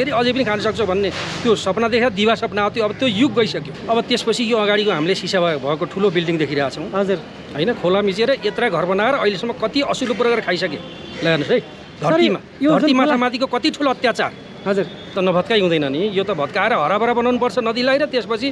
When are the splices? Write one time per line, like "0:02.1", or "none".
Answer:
0:03.7
0:15.1